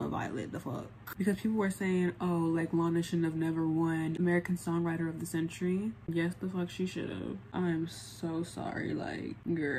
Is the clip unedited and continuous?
yes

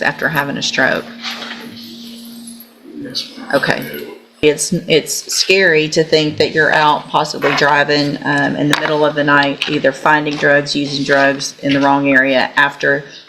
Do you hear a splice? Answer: yes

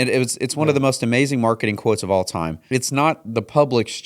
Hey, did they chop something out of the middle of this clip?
yes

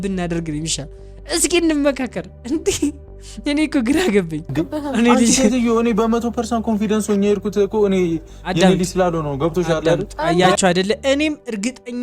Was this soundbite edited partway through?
yes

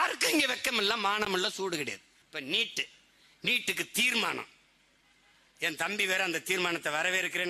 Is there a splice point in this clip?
yes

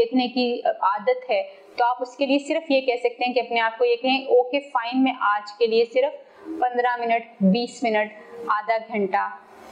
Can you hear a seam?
no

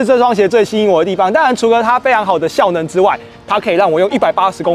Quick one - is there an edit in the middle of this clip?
yes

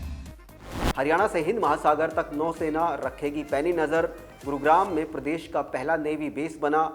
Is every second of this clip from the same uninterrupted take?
no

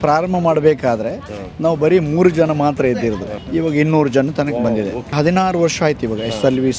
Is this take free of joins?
no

